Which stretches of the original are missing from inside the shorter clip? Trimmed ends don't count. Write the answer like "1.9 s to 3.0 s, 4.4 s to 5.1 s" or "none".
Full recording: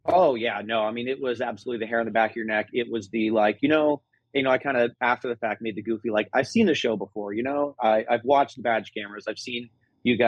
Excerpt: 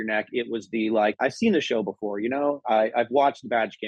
3.6 s to 6.3 s